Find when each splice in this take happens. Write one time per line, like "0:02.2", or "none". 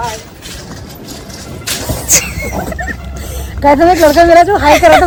none